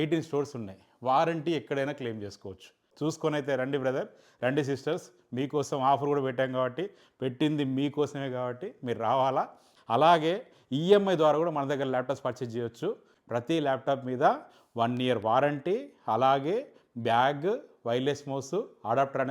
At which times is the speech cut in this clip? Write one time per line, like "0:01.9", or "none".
0:02.9
0:09.7
0:13.1